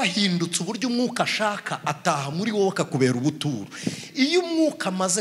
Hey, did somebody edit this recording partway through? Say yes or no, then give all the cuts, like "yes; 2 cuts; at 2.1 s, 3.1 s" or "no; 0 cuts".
no; 0 cuts